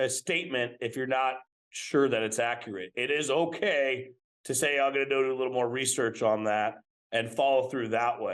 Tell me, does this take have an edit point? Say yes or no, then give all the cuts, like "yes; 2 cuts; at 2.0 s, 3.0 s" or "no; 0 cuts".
no; 0 cuts